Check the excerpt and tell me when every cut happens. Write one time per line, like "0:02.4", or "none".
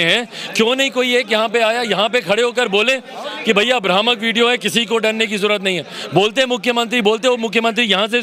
none